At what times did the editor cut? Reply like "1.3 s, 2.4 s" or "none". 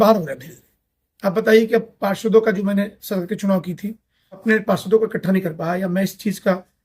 4.4 s